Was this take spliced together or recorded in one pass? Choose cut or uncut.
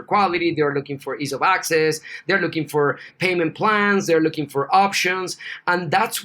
cut